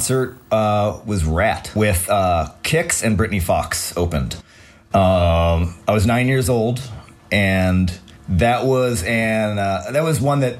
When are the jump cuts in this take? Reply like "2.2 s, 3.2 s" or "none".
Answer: 1.7 s